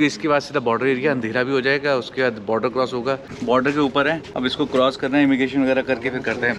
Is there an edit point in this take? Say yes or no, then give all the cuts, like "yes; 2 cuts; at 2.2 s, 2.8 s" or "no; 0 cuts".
yes; 2 cuts; at 3.3 s, 4.3 s